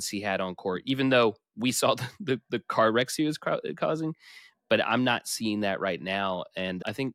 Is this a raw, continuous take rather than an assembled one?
yes; 0 cuts

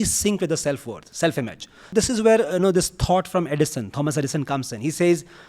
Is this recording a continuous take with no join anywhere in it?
no; 1 cut; at 1.9 s

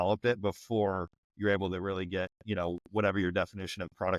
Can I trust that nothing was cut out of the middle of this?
yes; 0 cuts

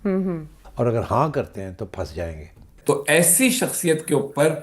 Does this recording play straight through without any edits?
no; 1 cut; at 2.7 s

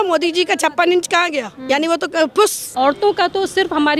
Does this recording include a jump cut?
yes; 2 cuts; at 1.5 s, 2.6 s

